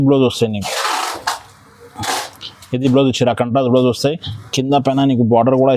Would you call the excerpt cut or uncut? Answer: uncut